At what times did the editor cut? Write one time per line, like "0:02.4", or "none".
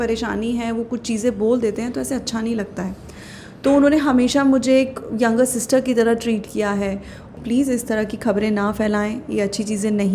0:07.4